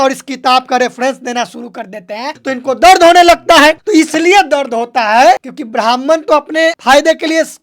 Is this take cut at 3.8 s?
no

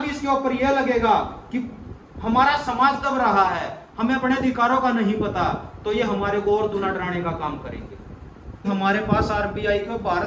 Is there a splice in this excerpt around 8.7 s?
yes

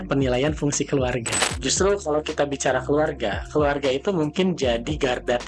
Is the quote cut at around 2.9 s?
no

